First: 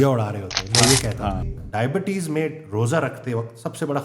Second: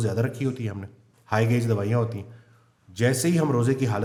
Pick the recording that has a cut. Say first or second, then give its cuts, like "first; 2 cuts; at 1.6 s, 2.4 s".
first; 1 cut; at 1.5 s